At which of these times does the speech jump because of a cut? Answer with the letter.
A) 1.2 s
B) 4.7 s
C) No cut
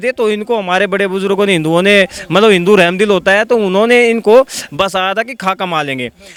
C